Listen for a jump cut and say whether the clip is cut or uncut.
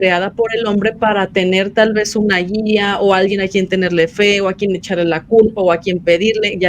uncut